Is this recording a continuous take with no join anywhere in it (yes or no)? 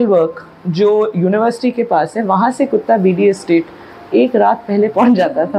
yes